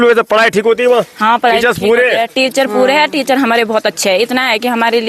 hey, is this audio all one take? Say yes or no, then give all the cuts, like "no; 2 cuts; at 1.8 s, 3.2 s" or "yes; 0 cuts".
yes; 0 cuts